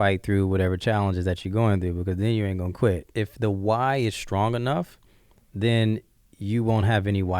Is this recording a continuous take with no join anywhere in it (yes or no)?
no